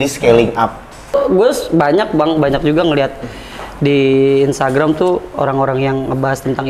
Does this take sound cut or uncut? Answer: cut